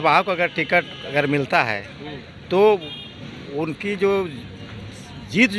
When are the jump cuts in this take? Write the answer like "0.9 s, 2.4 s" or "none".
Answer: none